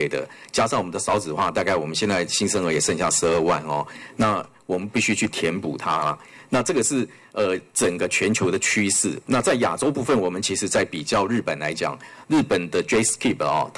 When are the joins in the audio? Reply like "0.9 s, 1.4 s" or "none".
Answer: none